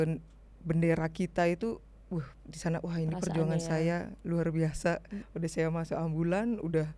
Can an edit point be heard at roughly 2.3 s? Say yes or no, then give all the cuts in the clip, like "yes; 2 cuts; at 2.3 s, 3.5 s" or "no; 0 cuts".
no; 1 cut; at 5.2 s